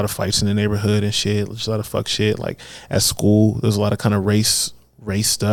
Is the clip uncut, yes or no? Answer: yes